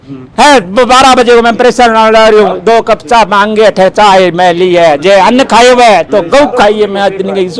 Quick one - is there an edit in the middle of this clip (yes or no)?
no